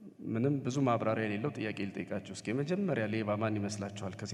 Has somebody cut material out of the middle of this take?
no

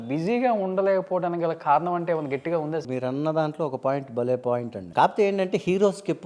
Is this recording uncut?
no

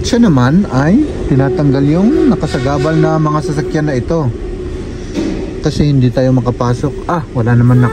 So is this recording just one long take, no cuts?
yes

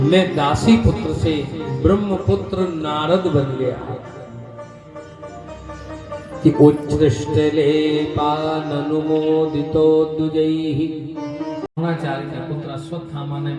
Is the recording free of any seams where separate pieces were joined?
no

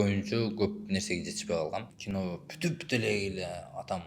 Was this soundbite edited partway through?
yes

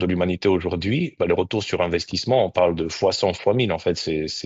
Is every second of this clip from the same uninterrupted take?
yes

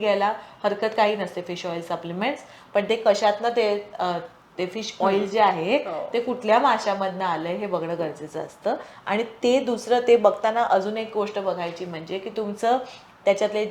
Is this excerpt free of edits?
yes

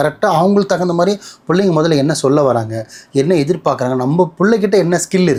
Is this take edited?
no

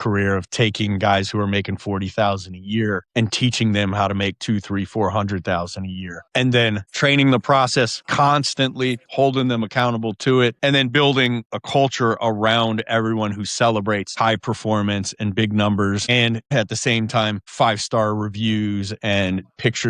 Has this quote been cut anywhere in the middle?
yes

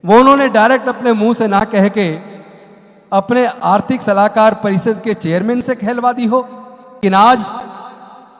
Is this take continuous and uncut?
no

